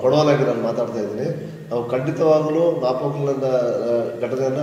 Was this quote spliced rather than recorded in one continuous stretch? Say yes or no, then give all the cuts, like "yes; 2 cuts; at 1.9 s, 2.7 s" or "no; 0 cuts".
no; 0 cuts